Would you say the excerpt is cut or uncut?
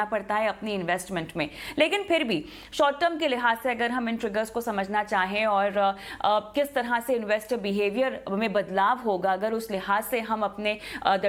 uncut